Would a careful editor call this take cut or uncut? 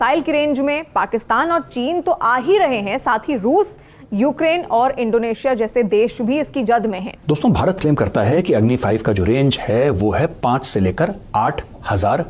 cut